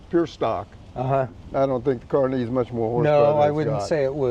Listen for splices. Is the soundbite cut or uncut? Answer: cut